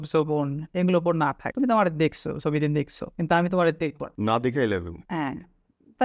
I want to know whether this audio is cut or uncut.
cut